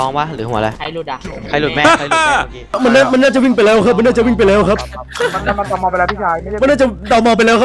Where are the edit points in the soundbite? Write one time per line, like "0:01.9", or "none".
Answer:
0:02.8